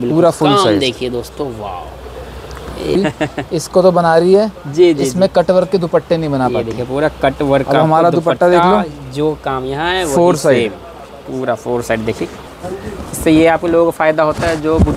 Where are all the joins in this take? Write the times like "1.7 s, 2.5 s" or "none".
3.0 s, 12.3 s